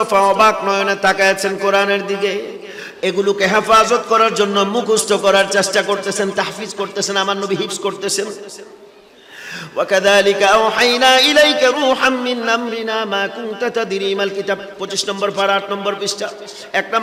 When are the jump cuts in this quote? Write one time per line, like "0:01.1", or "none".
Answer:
none